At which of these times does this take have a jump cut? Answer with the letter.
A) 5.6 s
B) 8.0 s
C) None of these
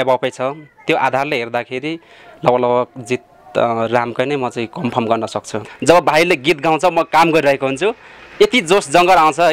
A